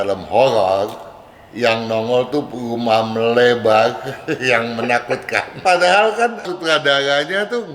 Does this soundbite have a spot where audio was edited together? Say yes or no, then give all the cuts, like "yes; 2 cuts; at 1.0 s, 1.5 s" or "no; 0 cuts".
yes; 2 cuts; at 5.6 s, 6.5 s